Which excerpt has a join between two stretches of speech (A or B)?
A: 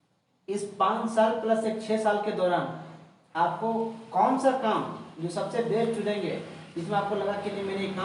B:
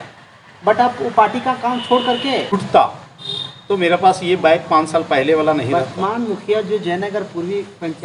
B